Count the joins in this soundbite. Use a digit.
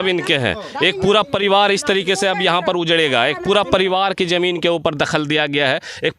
0